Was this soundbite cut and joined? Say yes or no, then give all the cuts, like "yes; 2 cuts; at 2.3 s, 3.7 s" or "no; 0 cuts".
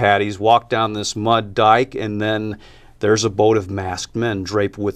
no; 0 cuts